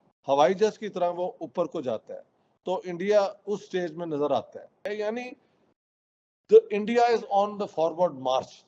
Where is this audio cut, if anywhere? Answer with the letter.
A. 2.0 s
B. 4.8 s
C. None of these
B